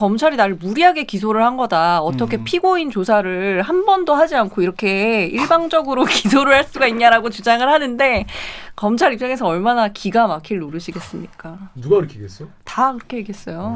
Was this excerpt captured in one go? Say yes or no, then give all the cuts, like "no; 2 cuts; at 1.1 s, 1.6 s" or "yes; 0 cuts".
yes; 0 cuts